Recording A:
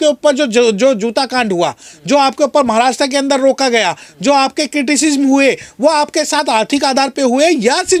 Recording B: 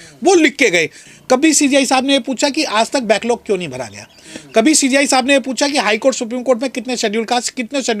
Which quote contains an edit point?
B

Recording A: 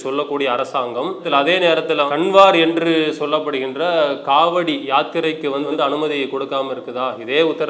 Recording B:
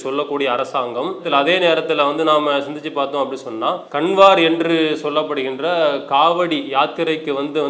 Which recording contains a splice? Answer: A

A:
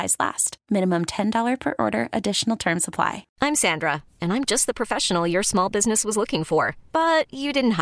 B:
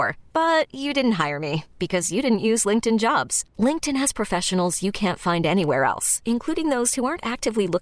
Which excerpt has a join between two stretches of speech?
A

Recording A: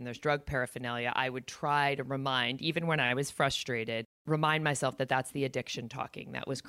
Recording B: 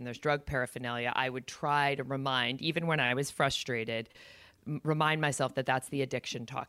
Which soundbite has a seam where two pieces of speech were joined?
A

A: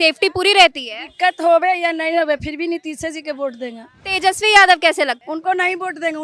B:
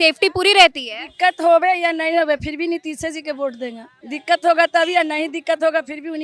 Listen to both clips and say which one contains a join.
A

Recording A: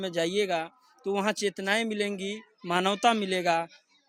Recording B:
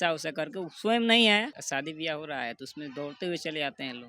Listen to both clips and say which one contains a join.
B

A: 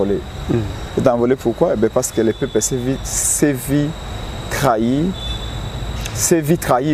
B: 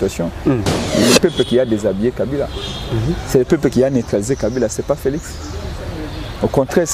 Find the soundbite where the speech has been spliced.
B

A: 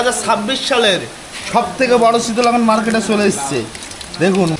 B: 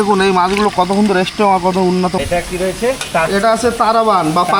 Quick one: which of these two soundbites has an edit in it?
B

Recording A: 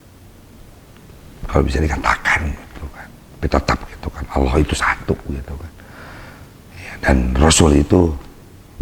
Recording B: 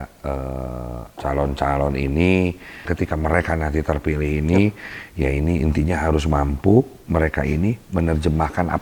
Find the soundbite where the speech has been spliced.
B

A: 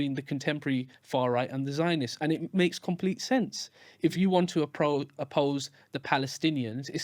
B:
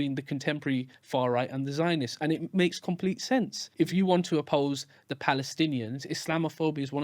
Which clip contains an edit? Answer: B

